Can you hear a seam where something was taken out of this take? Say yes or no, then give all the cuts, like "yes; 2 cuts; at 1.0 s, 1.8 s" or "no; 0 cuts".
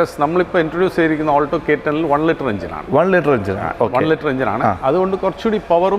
no; 0 cuts